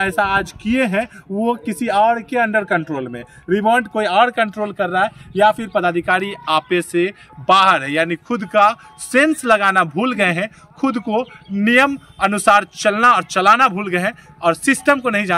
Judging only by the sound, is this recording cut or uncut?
uncut